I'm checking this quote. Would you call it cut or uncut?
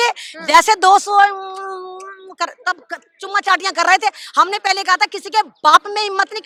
uncut